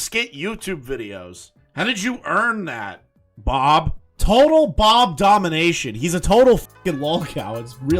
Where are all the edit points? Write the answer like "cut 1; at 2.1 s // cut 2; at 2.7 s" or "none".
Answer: cut 1; at 4.1 s